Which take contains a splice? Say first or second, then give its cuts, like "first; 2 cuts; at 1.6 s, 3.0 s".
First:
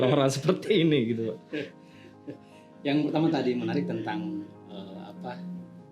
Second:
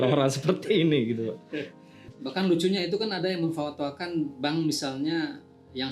second; 1 cut; at 2.1 s